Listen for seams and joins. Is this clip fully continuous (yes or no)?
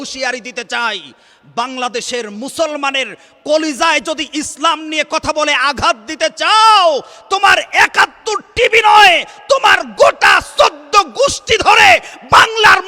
yes